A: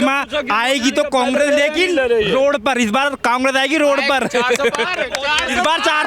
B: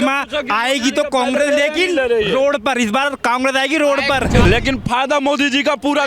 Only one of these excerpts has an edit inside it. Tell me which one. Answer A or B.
B